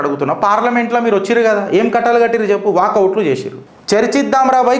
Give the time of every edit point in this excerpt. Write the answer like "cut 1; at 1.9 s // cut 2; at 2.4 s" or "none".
none